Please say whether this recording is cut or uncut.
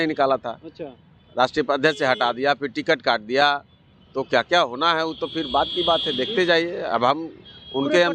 uncut